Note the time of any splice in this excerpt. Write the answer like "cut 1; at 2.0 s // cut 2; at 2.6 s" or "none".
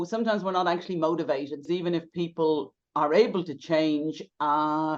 cut 1; at 1.6 s